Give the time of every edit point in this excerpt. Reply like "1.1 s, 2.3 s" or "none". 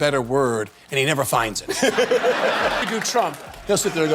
2.8 s